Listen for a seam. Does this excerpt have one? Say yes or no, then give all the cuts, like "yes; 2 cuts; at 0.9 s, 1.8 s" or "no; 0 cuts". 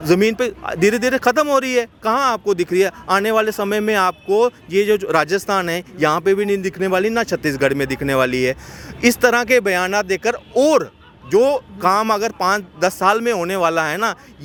no; 0 cuts